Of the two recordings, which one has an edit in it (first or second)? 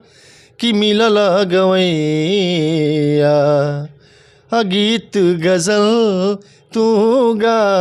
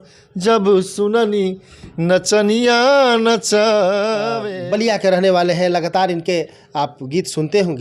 second